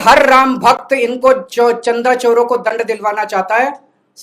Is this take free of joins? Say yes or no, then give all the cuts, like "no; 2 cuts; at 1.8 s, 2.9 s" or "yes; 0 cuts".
yes; 0 cuts